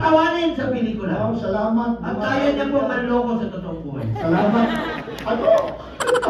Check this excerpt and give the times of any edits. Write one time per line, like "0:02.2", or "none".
none